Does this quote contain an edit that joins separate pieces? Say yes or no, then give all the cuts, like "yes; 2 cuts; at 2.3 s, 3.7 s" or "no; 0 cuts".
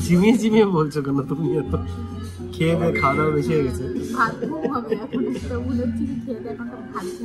no; 0 cuts